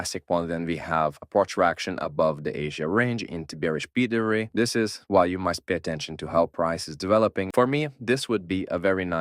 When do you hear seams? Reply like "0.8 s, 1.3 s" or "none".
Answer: 4.5 s, 7.5 s